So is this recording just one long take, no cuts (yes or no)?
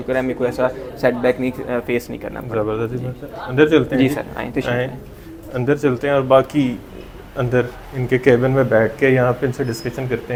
yes